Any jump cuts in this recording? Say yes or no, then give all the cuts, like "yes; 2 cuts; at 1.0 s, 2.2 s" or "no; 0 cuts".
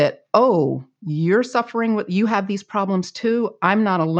no; 0 cuts